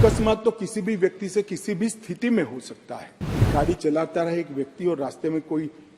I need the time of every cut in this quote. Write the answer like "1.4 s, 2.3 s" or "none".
3.5 s

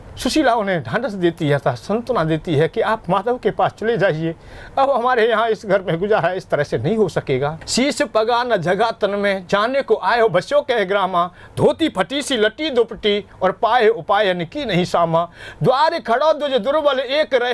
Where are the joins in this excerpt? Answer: 7.6 s

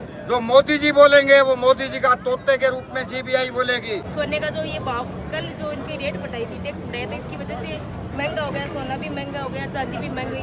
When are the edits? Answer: 4.1 s

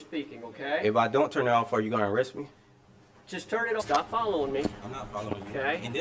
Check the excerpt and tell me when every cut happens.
1.5 s, 3.8 s

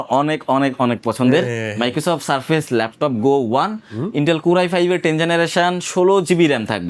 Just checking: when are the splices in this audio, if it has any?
none

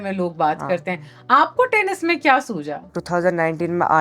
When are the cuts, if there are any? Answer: 3.0 s

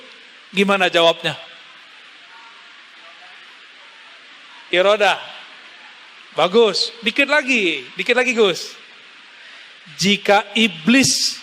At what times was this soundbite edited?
none

